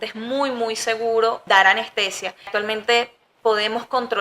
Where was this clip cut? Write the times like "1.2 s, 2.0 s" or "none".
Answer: 1.4 s, 2.5 s